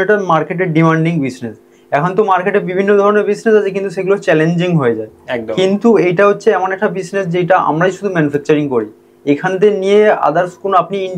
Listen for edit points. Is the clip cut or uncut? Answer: uncut